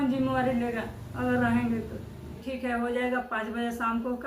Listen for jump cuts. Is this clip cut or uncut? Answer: cut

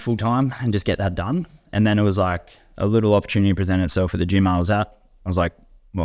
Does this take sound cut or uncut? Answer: uncut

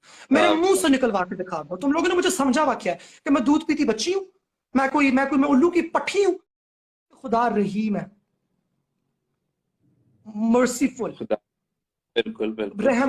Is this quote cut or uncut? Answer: cut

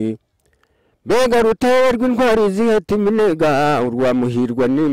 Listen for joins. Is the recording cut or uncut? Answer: uncut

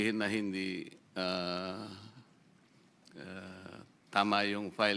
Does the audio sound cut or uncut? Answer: uncut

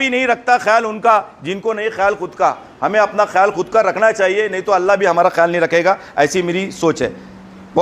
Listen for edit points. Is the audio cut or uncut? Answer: uncut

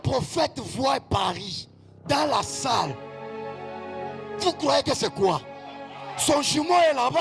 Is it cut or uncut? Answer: uncut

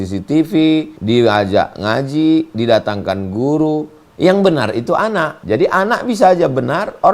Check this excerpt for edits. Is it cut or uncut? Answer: cut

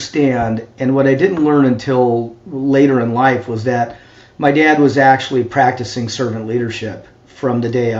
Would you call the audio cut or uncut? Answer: uncut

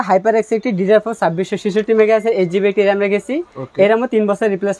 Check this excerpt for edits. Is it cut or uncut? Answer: uncut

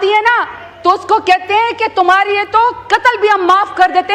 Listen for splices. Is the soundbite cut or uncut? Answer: uncut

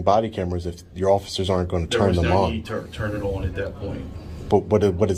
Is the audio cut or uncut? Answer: uncut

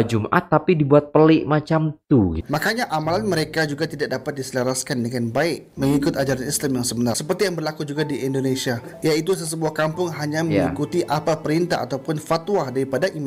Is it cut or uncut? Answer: cut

